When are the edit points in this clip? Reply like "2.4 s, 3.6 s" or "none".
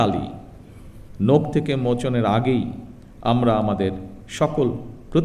none